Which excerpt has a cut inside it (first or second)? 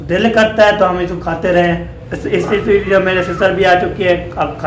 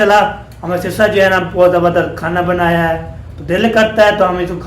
first